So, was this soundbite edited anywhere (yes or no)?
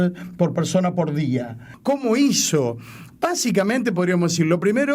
yes